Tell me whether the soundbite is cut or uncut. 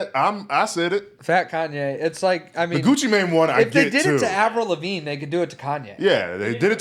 uncut